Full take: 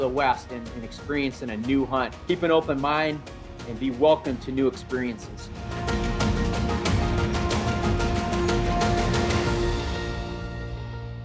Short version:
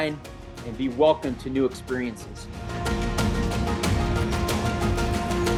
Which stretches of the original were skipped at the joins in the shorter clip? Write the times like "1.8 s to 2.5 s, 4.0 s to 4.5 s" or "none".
none